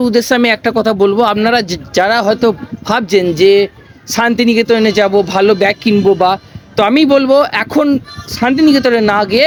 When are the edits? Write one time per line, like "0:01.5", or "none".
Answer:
none

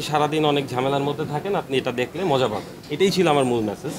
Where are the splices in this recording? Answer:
none

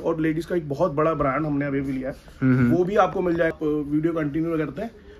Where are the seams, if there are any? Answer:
0:03.5

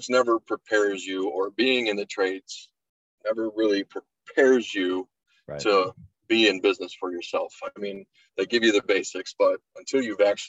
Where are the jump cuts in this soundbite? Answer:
none

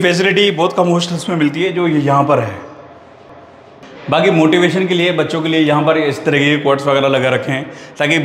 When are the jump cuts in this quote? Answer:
none

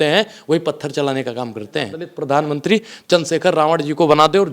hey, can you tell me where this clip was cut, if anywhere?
0:02.1

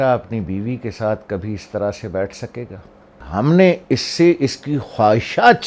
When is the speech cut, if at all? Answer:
0:03.2

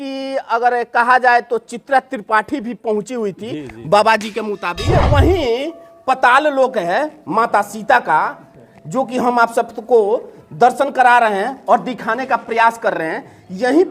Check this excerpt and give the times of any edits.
0:04.8

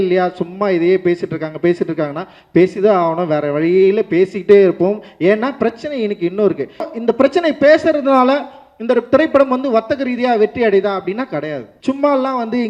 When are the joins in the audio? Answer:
0:06.9
0:11.7

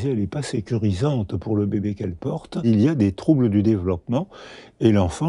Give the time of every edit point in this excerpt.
0:02.7

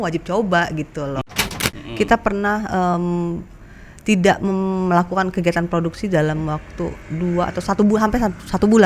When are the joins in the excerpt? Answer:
0:01.5

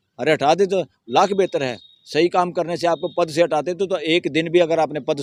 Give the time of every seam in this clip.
none

